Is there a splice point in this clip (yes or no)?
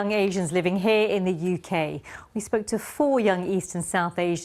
no